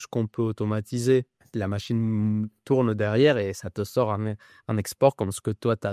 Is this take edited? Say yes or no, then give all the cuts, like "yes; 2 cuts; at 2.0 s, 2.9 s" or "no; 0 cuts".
yes; 1 cut; at 1.3 s